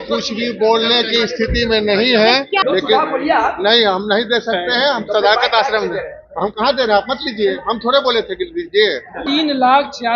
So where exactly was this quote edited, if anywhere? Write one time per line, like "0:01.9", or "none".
0:02.6
0:09.2